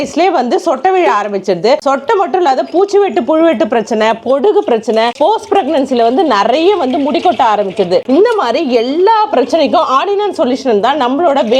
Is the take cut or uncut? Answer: uncut